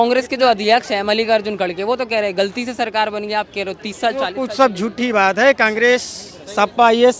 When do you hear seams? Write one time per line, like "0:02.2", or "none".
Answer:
none